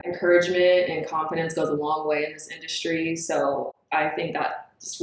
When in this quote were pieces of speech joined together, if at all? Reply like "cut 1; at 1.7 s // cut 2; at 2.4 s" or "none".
none